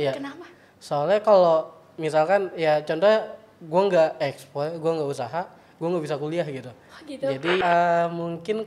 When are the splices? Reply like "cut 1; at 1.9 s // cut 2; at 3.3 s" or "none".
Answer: cut 1; at 7.6 s